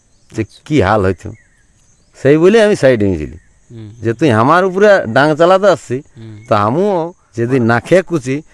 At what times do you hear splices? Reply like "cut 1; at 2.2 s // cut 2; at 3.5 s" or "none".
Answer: cut 1; at 7.2 s